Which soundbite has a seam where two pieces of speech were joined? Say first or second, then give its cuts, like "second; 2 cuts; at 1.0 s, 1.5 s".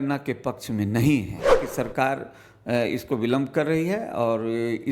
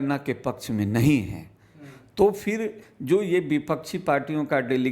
first; 1 cut; at 1.6 s